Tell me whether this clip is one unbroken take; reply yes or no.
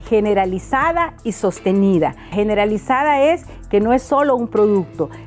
no